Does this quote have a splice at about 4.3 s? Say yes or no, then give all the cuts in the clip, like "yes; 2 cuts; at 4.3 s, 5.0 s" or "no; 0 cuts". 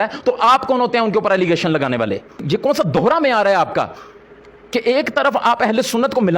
no; 1 cut; at 2.3 s